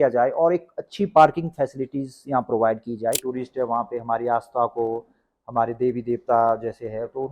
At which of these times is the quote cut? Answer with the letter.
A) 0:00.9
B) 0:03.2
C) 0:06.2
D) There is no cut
B